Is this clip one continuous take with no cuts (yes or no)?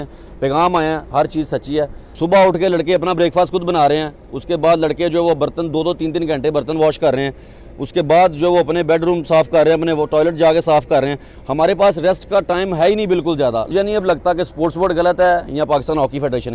no